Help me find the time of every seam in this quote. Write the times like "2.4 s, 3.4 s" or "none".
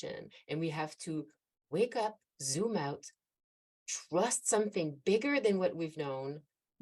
none